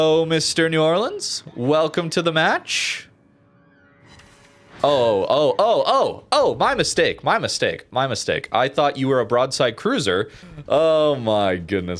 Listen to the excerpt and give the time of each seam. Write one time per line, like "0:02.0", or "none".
0:10.4